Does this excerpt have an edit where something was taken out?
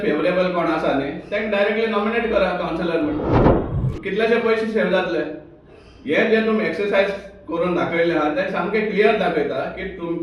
no; 0 cuts

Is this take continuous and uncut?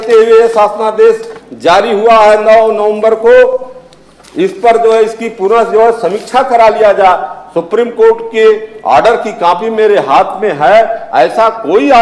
yes; 0 cuts

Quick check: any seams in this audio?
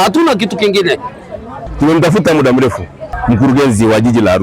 yes; 1 cut; at 1.7 s

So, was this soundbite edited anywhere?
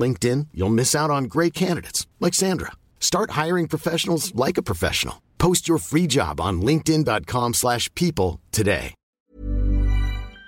yes; 1 cut; at 9.0 s

